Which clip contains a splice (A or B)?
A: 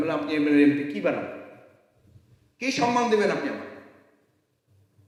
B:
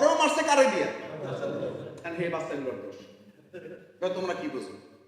B